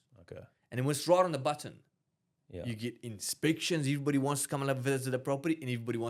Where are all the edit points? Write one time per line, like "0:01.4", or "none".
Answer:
none